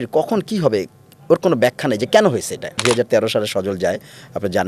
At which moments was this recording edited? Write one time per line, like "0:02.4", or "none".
0:02.8